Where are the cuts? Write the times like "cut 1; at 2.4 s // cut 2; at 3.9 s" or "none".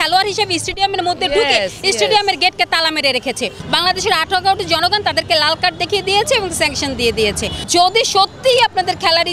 cut 1; at 3.6 s // cut 2; at 7.7 s